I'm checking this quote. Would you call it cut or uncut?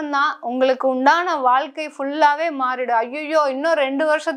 uncut